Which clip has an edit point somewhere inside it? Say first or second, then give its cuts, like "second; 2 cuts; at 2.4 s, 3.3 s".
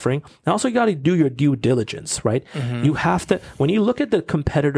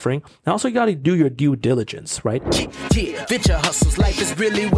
second; 1 cut; at 2.5 s